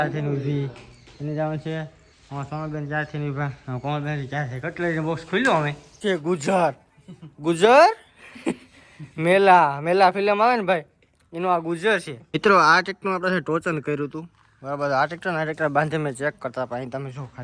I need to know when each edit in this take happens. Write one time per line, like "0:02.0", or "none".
0:06.0
0:12.2